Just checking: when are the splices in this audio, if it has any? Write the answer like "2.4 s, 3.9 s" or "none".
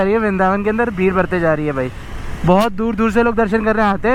none

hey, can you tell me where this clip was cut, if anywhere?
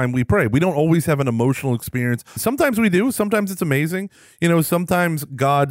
2.4 s

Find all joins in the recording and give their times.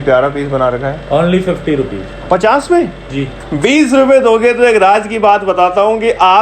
3.4 s

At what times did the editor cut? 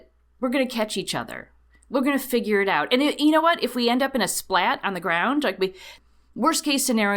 5.9 s

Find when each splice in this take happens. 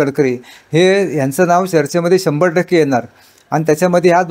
none

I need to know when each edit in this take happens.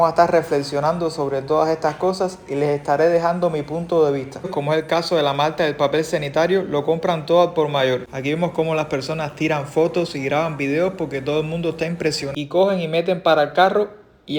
4.5 s, 8.1 s, 12.2 s

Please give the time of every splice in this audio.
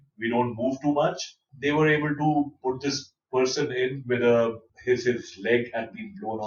1.5 s, 4.7 s

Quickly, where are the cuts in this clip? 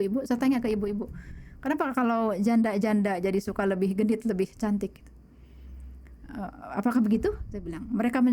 none

